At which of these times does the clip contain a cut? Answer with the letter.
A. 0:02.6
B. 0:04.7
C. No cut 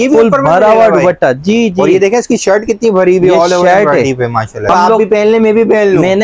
B